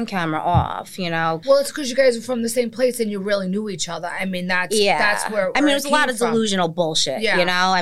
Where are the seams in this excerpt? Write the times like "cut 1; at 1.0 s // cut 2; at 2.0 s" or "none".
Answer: cut 1; at 1.4 s